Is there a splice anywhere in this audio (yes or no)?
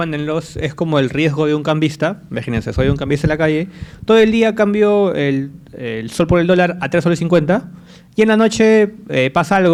no